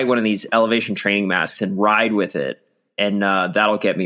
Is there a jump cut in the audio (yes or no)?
no